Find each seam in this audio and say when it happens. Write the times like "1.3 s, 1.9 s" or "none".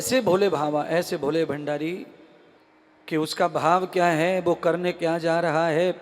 none